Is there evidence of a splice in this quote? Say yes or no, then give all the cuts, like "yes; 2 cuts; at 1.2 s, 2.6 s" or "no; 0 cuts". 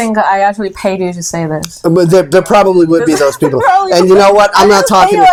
no; 0 cuts